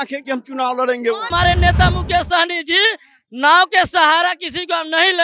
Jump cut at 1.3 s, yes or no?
yes